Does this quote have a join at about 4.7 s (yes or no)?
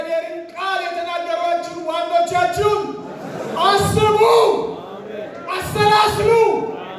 no